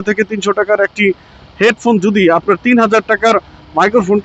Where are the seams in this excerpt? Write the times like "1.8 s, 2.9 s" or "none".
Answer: none